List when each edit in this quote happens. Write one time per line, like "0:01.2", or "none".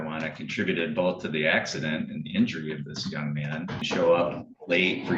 0:03.9